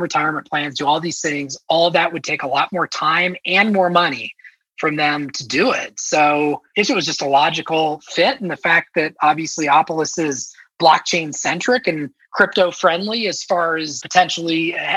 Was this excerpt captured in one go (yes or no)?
no